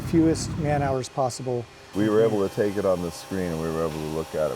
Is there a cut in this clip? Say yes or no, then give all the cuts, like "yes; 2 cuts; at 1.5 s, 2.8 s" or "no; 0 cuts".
yes; 1 cut; at 1.8 s